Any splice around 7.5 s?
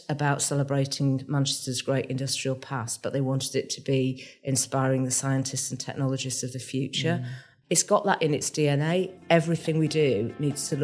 yes; 1 cut; at 7.5 s

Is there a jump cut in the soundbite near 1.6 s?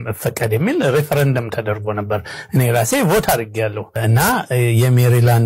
no; 1 cut; at 4.0 s

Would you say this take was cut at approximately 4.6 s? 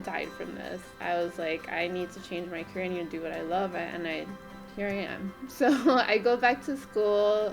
no; 1 cut; at 1.0 s

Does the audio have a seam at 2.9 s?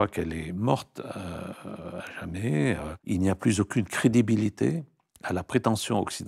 yes; 1 cut; at 2.9 s

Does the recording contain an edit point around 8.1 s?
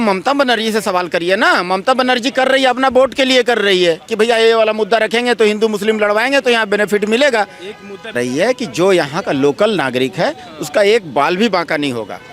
yes; 1 cut; at 8.1 s

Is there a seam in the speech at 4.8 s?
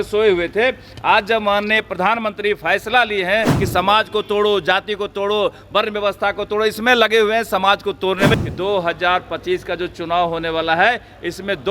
no; 2 cuts; at 3.6 s, 8.4 s

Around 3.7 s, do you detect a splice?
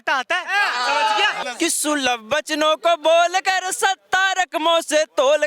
no; 1 cut; at 1.4 s

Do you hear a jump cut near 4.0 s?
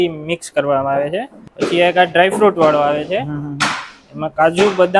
no; 1 cut; at 1.4 s

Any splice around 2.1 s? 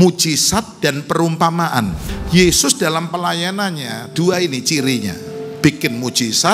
yes; 1 cut; at 2.1 s

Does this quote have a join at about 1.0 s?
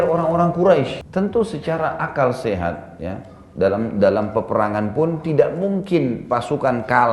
yes; 1 cut; at 1.0 s

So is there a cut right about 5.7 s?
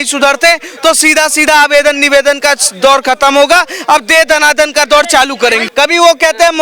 yes; 1 cut; at 5.7 s

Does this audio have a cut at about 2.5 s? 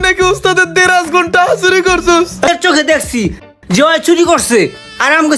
yes; 1 cut; at 2.5 s

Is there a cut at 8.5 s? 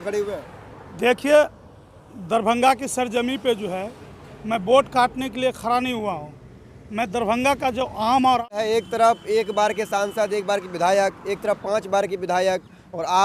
yes; 1 cut; at 8.5 s

